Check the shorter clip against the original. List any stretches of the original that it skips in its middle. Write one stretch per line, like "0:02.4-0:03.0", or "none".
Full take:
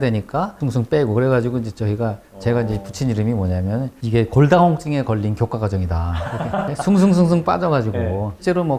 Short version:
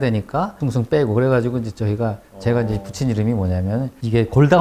none

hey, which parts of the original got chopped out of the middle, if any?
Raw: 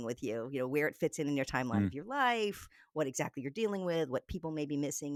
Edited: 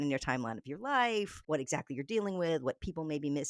0:02.6-0:02.8

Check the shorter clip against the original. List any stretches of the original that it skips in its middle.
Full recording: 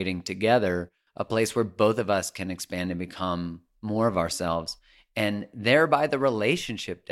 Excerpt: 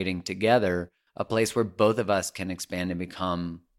none

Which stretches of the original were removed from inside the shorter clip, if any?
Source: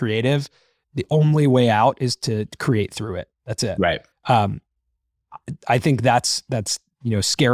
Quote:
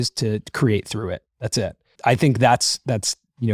0:03.7-0:05.3

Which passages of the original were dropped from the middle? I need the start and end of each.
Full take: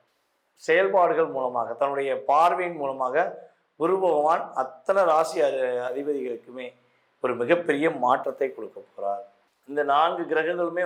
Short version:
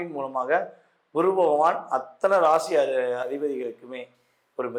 none

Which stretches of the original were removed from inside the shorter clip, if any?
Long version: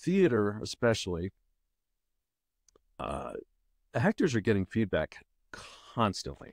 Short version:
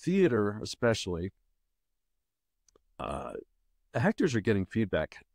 none

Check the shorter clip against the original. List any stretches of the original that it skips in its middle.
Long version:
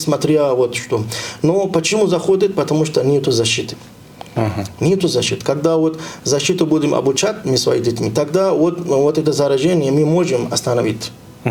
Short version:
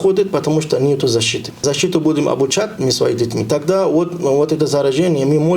0:03.7-0:06.1

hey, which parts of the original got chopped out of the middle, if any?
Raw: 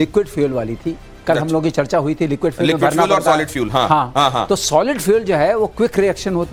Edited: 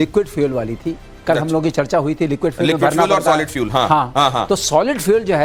none

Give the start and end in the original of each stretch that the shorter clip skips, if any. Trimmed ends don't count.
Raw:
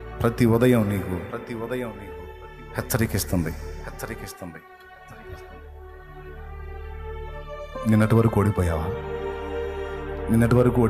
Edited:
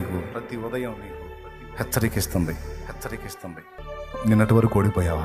0:04.8-0:07.4

